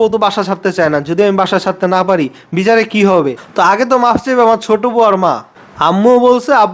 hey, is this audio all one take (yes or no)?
no